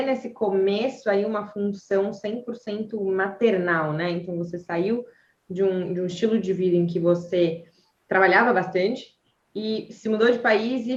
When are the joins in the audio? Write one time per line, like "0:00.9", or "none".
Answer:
none